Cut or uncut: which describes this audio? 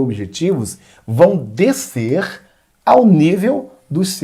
uncut